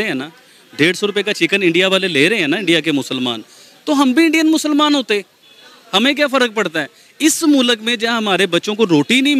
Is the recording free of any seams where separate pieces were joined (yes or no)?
yes